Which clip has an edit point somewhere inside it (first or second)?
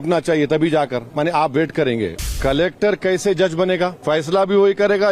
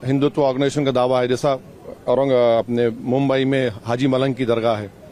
first